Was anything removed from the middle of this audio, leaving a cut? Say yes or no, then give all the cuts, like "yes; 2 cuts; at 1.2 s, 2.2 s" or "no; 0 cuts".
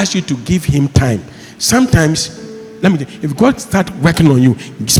no; 0 cuts